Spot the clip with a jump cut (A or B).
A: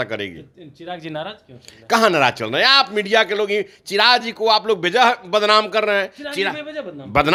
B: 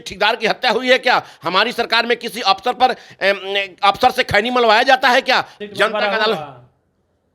B